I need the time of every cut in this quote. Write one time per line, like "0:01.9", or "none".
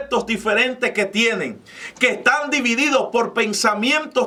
none